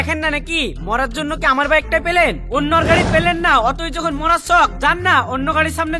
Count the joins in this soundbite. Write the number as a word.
zero